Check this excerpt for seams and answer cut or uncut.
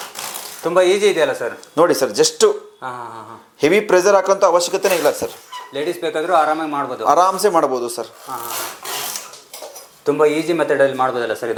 uncut